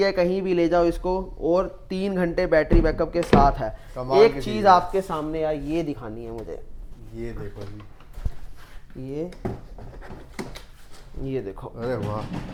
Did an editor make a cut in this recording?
no; 0 cuts

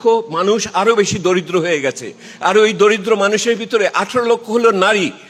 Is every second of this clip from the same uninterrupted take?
yes; 0 cuts

